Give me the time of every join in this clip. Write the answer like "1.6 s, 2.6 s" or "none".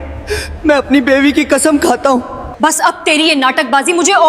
2.5 s